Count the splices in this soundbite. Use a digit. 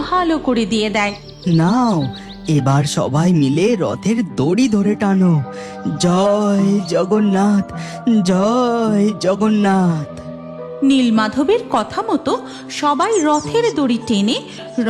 1